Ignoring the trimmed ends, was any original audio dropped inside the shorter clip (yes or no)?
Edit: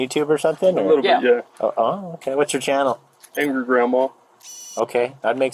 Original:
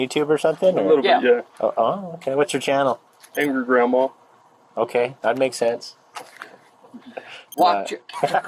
no